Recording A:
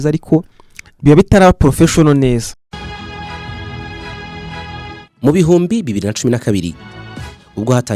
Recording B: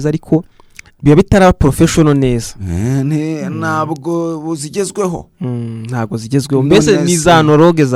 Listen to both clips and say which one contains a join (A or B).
A